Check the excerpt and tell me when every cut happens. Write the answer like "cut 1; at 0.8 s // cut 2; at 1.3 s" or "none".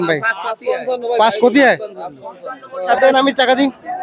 cut 1; at 2.8 s